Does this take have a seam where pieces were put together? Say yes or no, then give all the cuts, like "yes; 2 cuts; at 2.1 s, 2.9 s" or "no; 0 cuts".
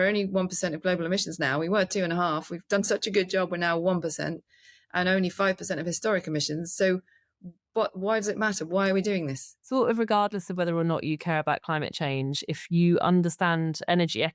yes; 1 cut; at 9.6 s